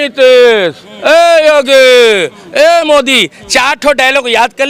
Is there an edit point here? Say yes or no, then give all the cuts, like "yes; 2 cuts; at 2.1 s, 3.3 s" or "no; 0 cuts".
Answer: no; 0 cuts